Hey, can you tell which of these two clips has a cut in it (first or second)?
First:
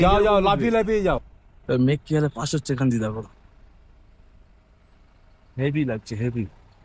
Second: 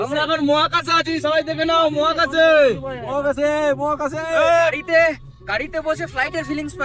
first